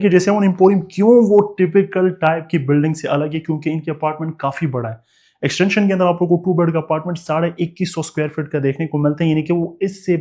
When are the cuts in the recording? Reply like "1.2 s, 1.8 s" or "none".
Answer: none